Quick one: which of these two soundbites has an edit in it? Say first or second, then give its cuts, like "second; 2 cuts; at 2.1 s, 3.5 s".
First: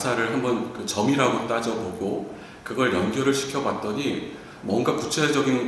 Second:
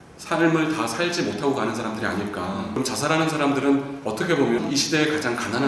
second; 2 cuts; at 2.8 s, 4.6 s